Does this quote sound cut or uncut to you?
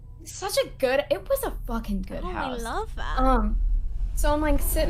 uncut